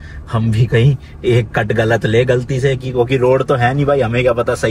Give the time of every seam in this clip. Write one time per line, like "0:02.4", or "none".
none